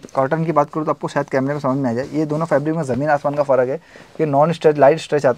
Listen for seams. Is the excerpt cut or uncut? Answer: uncut